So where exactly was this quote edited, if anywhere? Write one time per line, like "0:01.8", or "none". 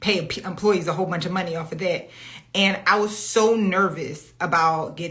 none